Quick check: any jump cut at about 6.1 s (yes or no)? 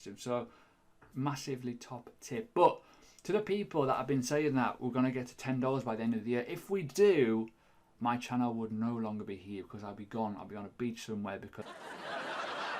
no